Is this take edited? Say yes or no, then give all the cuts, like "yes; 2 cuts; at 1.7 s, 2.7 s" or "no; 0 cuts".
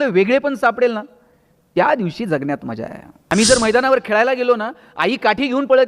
yes; 1 cut; at 3.3 s